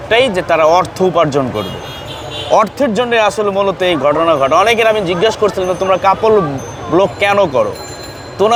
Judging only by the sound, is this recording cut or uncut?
uncut